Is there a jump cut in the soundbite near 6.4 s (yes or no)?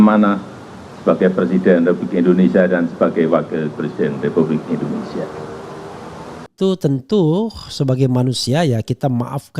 yes